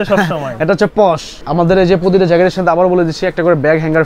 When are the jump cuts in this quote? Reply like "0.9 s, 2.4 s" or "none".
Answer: 1.3 s